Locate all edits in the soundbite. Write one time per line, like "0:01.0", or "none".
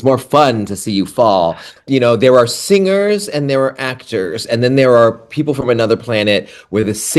0:01.8